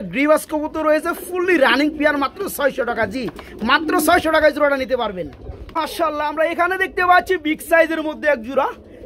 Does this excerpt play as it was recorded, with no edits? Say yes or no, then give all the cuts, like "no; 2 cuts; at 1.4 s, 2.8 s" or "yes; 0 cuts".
yes; 0 cuts